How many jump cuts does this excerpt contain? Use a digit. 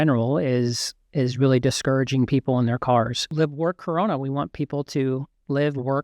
1